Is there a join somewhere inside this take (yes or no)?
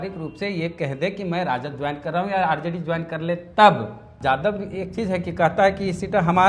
yes